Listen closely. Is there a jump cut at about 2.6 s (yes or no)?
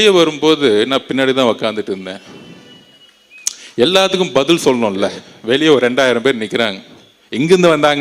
no